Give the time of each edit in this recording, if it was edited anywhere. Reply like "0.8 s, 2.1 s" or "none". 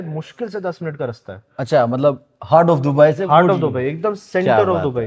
none